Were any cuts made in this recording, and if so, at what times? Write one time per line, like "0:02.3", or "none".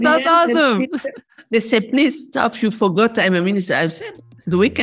0:01.3